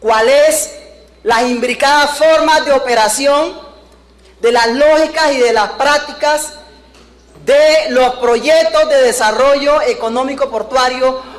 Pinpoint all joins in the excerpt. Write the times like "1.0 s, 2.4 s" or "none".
9.6 s